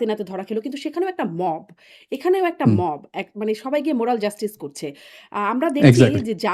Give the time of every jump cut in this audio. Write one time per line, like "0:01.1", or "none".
none